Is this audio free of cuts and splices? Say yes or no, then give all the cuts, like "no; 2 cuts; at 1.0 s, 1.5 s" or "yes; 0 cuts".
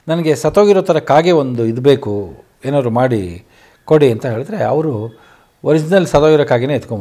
yes; 0 cuts